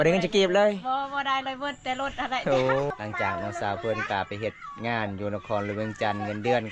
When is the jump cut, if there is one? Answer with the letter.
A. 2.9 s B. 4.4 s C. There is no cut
A